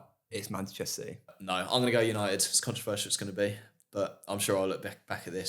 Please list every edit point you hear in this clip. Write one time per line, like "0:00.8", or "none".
0:01.4